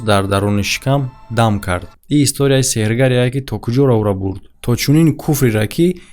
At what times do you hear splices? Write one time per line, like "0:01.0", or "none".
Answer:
0:01.9